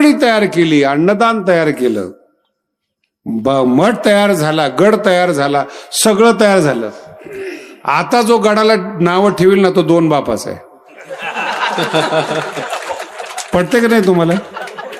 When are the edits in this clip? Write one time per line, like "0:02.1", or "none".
none

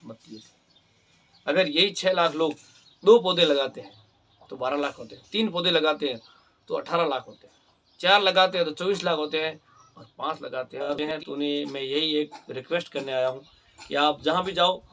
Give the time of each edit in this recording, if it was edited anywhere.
0:10.9

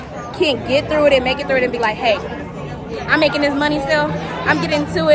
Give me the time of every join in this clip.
none

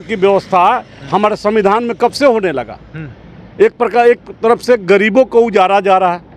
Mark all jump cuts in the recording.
none

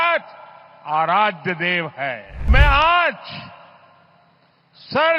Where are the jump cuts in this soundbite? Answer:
0:02.5

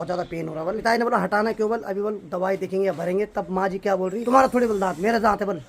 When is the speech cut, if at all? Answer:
0:00.8
0:04.2

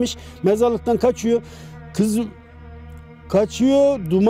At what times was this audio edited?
none

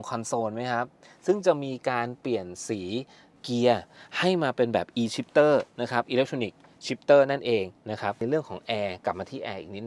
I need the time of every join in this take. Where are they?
0:03.2
0:08.2

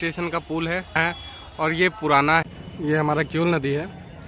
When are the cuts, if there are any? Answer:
0:01.0
0:02.5

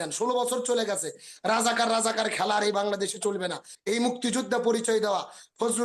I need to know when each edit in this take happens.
0:03.7

